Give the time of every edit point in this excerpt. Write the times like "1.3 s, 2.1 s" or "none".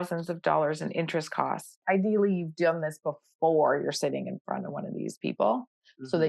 1.8 s